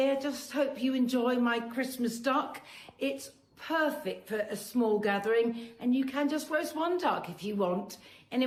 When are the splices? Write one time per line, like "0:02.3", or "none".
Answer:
none